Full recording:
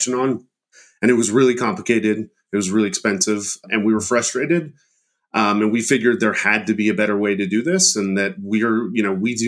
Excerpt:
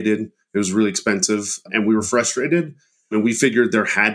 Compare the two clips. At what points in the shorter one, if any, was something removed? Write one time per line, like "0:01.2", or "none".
0:03.1